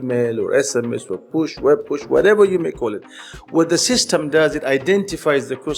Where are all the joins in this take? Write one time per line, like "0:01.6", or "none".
none